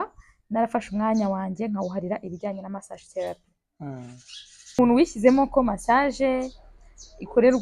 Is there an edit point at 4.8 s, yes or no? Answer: yes